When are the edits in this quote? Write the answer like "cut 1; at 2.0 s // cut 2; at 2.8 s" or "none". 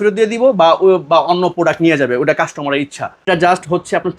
cut 1; at 3.3 s